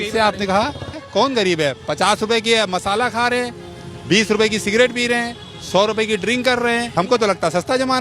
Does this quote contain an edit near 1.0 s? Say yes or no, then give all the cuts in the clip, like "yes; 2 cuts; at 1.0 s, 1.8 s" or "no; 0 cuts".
yes; 2 cuts; at 1.0 s, 6.9 s